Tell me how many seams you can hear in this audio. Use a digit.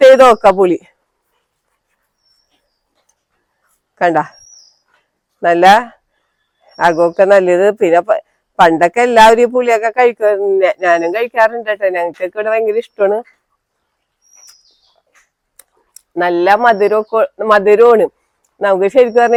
0